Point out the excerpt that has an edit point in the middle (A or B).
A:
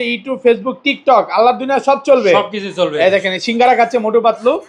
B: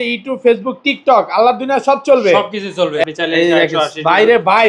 B